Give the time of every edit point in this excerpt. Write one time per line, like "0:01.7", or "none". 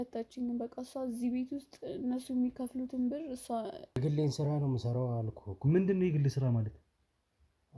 0:04.0